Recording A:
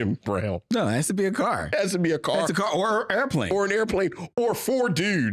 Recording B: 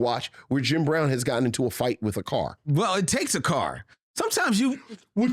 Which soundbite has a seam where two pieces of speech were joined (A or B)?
B